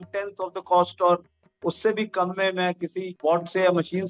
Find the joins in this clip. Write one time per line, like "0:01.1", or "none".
0:03.1